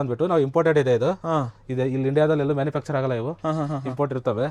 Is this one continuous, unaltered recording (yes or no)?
yes